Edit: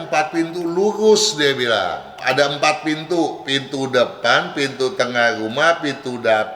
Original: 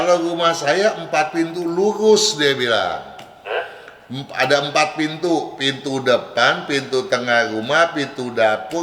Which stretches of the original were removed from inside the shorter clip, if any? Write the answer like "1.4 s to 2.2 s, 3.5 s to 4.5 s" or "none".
3.1 s to 4.2 s